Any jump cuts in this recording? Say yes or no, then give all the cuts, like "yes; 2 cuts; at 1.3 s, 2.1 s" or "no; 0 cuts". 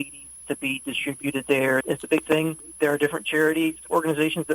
yes; 1 cut; at 1.8 s